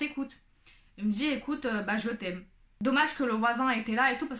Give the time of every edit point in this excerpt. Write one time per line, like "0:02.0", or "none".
0:02.6